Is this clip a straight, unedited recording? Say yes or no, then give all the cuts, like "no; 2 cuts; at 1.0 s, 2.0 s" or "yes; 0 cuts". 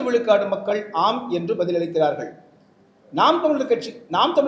yes; 0 cuts